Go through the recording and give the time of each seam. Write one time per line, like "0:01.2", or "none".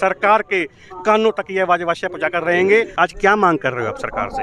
0:02.9